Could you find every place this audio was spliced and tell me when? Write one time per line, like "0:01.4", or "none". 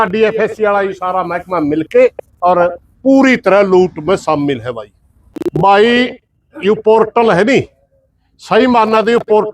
0:05.3